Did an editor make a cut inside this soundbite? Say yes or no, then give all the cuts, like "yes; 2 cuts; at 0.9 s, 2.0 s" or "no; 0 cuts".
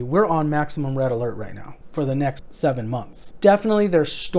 yes; 2 cuts; at 2.2 s, 3.2 s